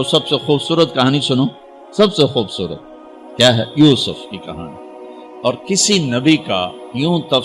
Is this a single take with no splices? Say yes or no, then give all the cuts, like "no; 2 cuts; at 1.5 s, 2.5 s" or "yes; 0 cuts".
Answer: yes; 0 cuts